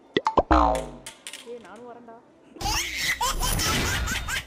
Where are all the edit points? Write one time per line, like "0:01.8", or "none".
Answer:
0:02.5